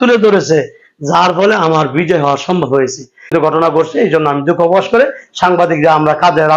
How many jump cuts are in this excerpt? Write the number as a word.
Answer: one